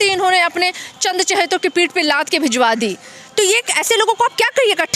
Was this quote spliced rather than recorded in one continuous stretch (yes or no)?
no